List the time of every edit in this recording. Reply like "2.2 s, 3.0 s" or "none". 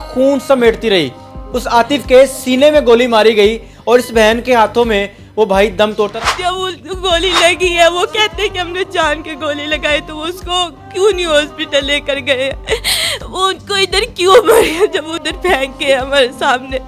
6.1 s